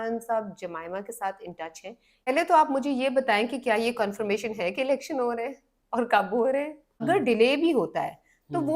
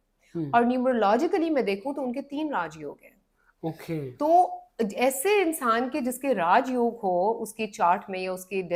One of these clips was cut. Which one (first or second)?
first